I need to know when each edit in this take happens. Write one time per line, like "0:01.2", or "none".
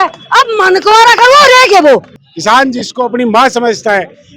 0:02.2